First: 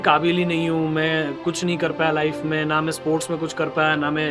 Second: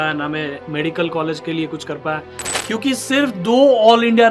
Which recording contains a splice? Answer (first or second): second